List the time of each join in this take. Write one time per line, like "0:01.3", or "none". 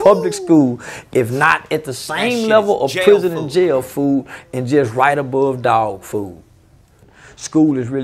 0:06.8